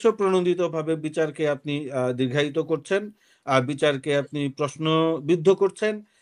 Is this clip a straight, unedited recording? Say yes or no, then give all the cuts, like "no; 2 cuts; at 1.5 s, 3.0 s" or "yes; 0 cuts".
yes; 0 cuts